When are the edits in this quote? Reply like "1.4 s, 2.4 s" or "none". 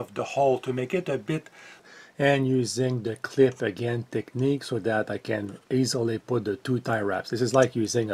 1.9 s